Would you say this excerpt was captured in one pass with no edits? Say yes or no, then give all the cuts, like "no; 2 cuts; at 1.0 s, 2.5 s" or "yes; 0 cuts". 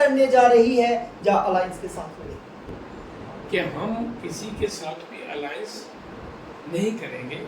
no; 1 cut; at 2.7 s